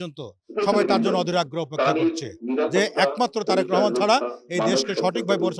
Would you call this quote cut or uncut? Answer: uncut